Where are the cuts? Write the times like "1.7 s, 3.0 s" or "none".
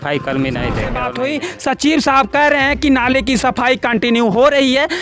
1.0 s